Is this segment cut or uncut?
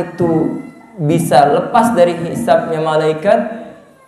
uncut